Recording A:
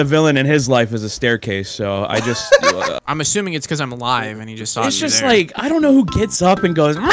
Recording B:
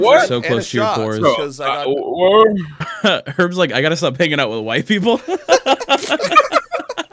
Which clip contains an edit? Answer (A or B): A